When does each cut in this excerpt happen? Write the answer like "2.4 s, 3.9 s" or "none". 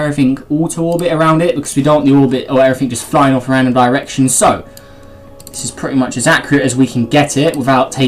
7.0 s